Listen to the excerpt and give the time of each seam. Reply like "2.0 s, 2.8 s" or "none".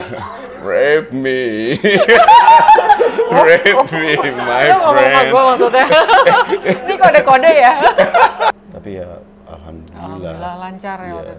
8.7 s